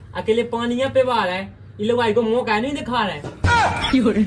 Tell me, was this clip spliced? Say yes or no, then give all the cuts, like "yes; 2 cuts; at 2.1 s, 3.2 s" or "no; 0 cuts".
yes; 1 cut; at 3.3 s